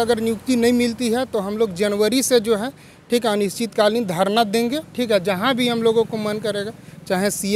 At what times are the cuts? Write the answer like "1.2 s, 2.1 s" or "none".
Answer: none

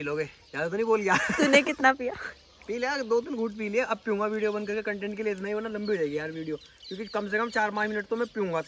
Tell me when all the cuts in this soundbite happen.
none

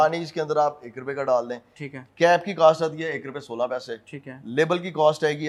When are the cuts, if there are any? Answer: none

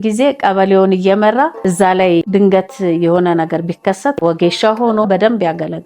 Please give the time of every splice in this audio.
4.1 s

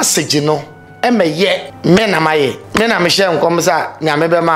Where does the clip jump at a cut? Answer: 1.7 s, 2.6 s

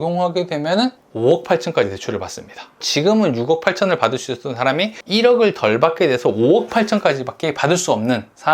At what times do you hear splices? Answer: 2.8 s

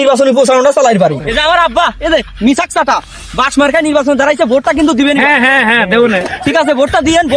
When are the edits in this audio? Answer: 1.3 s

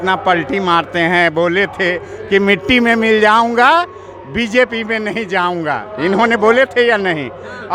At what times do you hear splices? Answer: none

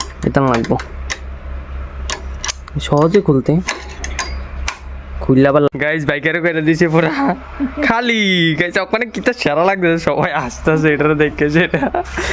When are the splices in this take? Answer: 5.7 s

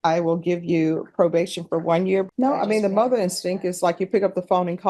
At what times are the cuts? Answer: 2.3 s

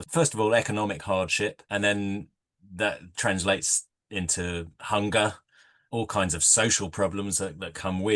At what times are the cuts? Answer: 1.6 s, 5.7 s

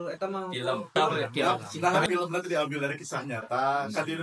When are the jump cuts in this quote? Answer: 0.9 s

